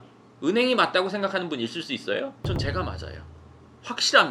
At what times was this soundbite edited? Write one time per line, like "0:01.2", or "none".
none